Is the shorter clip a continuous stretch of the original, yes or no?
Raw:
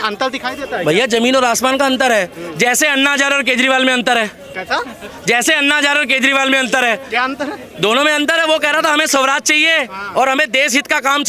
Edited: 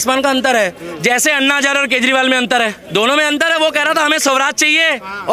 no